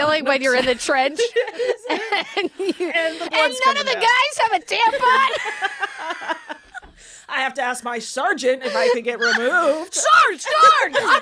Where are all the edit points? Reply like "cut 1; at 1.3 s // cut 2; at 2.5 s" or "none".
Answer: none

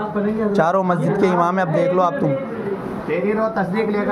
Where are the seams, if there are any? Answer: none

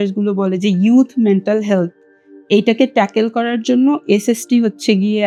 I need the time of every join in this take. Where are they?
none

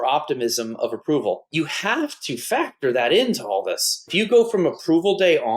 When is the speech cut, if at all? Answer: cut 1; at 1.5 s // cut 2; at 4.1 s

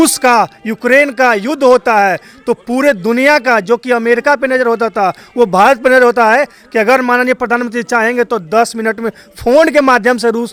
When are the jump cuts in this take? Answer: none

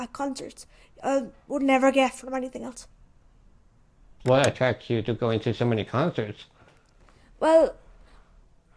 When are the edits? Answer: cut 1; at 4.2 s

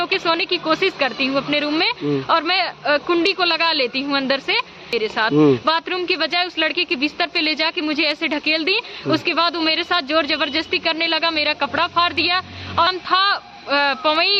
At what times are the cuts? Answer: cut 1; at 4.9 s // cut 2; at 12.9 s

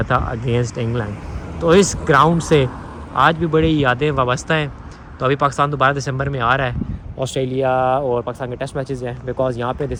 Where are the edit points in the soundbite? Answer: none

